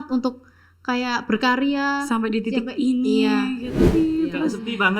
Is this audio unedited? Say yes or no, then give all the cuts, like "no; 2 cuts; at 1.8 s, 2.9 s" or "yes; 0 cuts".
no; 1 cut; at 3.9 s